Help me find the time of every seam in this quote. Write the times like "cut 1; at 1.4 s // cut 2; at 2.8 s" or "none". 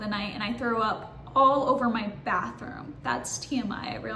none